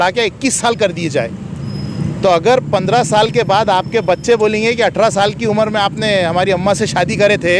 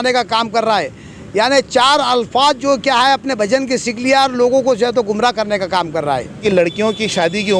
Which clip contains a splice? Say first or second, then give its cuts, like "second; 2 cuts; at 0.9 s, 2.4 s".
second; 1 cut; at 6.4 s